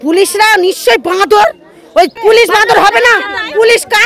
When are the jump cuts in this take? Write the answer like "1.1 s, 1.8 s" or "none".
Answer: 2.1 s